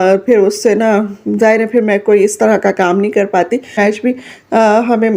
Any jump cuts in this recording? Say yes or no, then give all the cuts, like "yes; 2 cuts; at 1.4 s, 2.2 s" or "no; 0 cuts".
yes; 1 cut; at 3.8 s